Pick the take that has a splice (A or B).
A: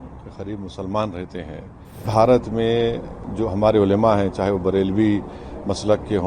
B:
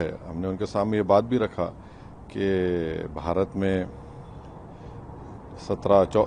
A